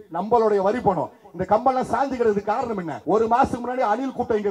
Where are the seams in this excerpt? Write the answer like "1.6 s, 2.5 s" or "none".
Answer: 2.9 s